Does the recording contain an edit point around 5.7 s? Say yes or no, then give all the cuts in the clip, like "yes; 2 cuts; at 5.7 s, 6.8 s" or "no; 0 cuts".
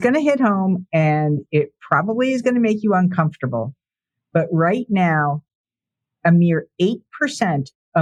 no; 0 cuts